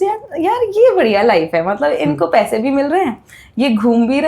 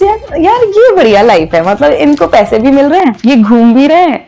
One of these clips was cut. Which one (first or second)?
second